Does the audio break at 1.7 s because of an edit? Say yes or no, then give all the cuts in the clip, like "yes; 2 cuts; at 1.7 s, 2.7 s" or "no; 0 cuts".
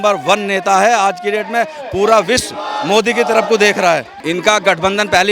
no; 1 cut; at 4.1 s